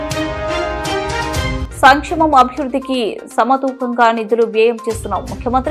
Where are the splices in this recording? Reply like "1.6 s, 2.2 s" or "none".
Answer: none